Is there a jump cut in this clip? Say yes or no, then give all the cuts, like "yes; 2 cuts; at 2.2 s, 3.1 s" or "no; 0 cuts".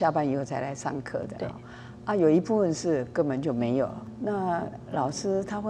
yes; 1 cut; at 4.1 s